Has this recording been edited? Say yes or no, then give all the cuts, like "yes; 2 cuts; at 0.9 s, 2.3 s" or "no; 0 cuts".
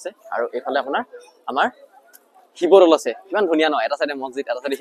no; 0 cuts